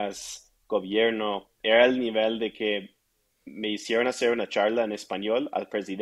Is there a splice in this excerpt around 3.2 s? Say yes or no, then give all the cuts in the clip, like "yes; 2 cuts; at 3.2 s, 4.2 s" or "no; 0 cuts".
no; 1 cut; at 1.5 s